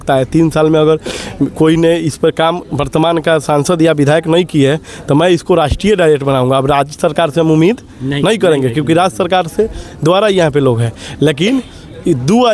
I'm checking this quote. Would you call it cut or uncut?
uncut